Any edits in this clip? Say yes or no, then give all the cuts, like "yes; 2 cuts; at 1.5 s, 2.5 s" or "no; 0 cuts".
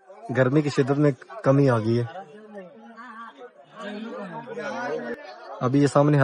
yes; 1 cut; at 5.1 s